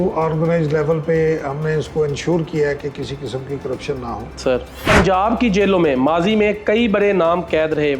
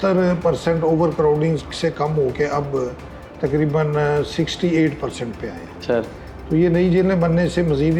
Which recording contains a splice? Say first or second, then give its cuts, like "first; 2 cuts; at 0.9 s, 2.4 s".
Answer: first; 1 cut; at 4.4 s